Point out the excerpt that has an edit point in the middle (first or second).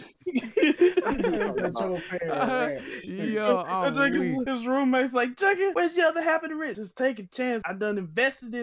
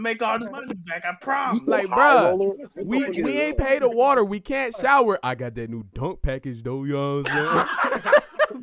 first